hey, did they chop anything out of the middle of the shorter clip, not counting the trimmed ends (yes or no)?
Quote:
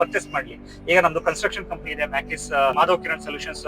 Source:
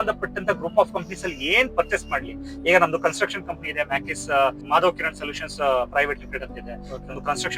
yes